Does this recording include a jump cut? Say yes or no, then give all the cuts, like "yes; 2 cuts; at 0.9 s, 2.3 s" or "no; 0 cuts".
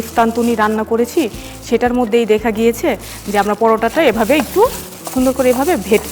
no; 0 cuts